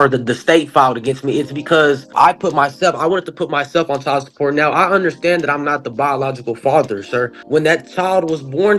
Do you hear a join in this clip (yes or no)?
yes